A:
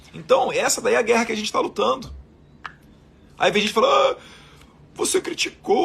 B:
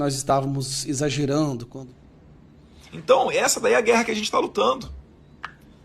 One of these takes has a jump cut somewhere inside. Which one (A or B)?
B